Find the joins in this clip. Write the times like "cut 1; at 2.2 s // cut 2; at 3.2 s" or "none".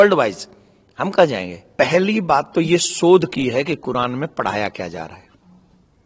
cut 1; at 1.6 s